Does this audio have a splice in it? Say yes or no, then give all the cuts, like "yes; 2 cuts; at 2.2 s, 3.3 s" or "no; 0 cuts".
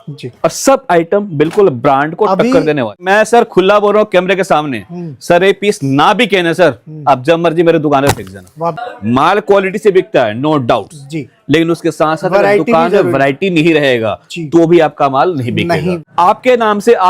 yes; 3 cuts; at 3.0 s, 8.8 s, 16.0 s